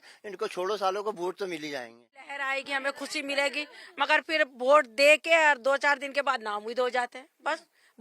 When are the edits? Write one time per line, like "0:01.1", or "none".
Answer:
0:02.3

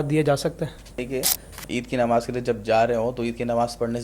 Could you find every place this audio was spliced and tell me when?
0:01.0

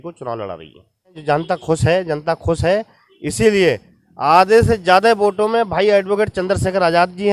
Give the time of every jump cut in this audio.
0:01.2

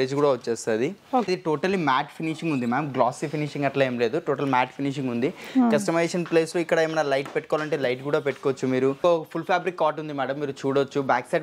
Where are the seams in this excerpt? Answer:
0:01.3
0:09.0

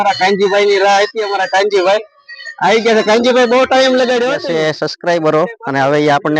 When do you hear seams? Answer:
0:04.4

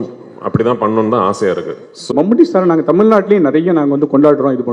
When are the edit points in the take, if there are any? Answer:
0:02.1

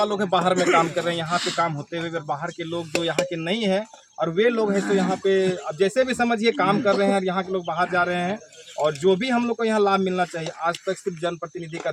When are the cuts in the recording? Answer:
none

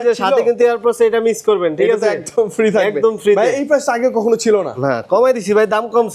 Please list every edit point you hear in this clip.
none

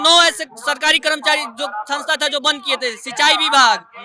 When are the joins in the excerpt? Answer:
none

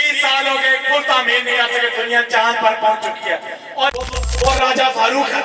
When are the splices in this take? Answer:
0:03.9

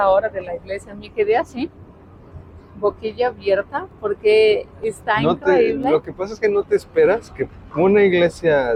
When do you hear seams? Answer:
none

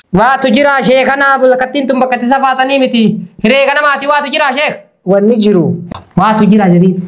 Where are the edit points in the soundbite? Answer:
0:05.9

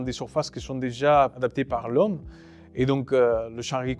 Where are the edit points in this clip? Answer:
0:01.3

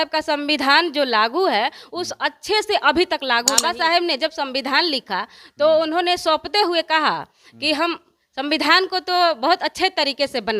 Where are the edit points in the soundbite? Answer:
0:03.5

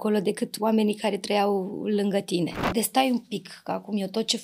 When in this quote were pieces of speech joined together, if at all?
0:02.6

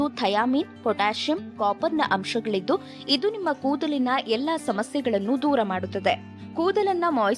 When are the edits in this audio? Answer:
0:06.4

